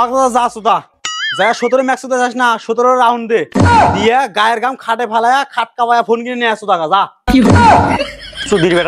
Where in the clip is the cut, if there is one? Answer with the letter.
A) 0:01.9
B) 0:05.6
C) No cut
C